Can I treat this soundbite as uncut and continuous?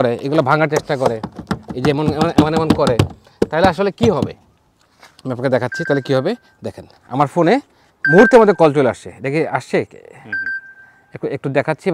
yes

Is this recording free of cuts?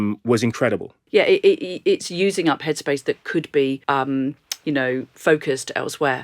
no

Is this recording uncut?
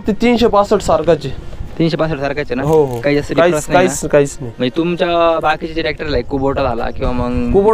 yes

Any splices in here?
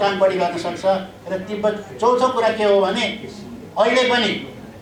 no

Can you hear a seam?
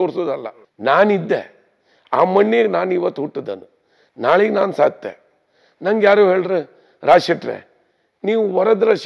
no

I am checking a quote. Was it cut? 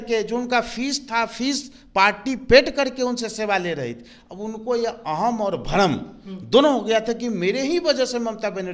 no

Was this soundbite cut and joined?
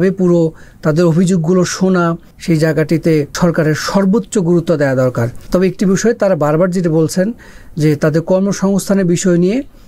yes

